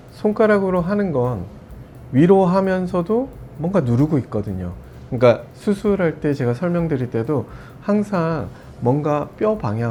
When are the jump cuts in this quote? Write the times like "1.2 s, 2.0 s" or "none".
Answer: none